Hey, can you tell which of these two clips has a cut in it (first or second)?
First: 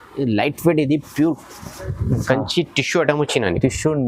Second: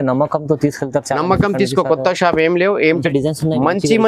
second